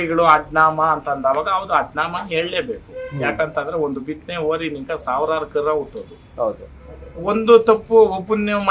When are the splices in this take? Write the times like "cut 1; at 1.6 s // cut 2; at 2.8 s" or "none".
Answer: none